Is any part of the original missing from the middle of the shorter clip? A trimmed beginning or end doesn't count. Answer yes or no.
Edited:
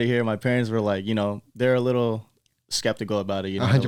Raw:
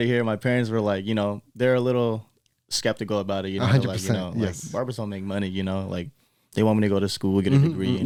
no